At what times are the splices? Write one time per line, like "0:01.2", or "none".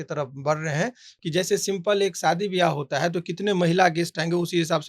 0:01.1